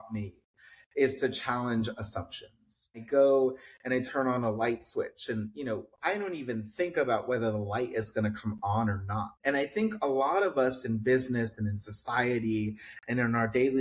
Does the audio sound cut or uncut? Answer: cut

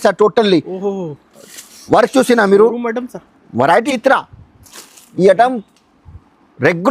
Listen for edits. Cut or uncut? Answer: cut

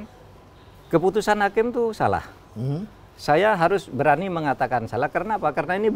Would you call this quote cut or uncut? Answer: uncut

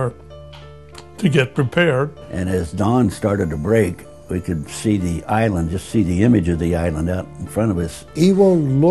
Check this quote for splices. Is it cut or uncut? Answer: cut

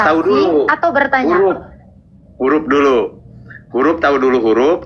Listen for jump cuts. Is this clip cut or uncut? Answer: uncut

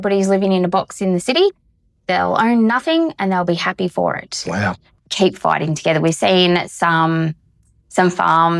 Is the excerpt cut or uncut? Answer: cut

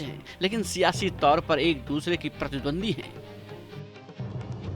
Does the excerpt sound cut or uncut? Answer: cut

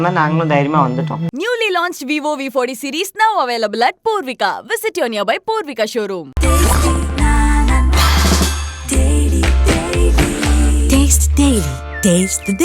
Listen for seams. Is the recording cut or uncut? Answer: cut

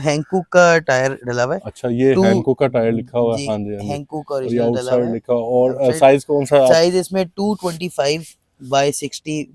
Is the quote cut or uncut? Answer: uncut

